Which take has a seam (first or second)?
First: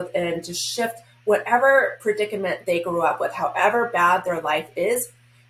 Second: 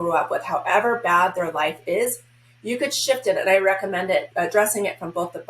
second